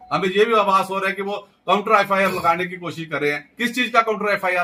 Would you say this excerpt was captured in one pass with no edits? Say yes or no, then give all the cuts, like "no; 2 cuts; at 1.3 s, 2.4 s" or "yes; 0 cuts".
yes; 0 cuts